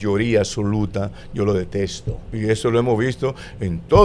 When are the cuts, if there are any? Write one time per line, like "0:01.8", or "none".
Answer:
0:02.2